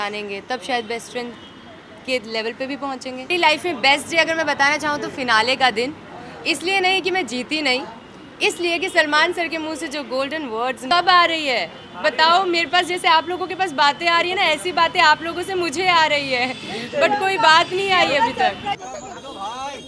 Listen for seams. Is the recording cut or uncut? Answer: cut